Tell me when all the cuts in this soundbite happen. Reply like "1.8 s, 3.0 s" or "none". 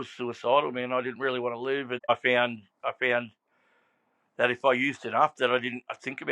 2.1 s